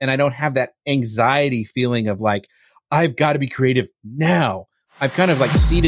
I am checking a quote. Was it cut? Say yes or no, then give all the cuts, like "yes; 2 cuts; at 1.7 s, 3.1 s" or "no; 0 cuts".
no; 0 cuts